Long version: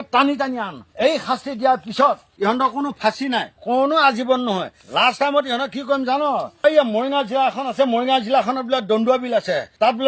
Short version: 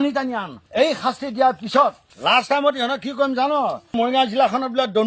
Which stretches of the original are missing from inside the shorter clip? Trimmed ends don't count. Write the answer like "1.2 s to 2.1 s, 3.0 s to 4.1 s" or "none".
2.3 s to 4.7 s, 6.6 s to 7.9 s